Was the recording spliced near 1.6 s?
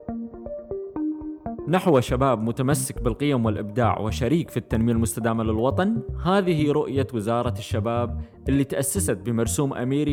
yes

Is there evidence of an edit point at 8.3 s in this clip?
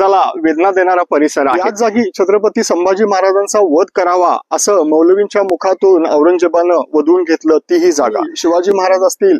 yes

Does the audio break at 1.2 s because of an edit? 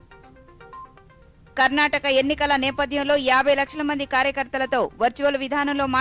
yes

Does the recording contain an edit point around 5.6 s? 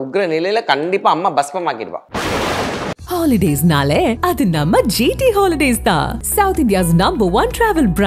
no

